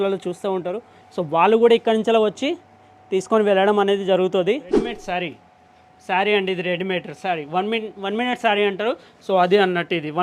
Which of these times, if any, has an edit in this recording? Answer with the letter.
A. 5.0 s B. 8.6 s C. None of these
A